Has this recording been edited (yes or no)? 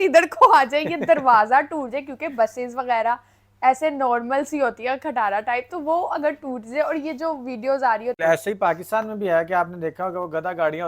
yes